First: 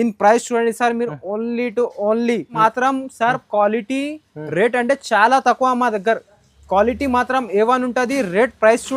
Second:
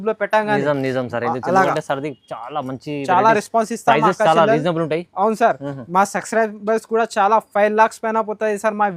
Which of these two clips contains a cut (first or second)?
first